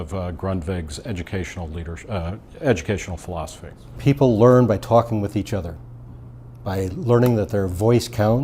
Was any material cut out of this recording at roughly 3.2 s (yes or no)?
no